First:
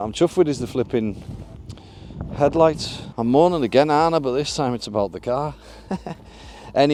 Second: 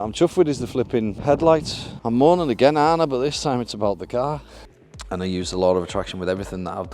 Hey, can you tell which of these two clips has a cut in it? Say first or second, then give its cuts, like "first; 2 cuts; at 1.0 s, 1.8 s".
second; 2 cuts; at 1.2 s, 4.5 s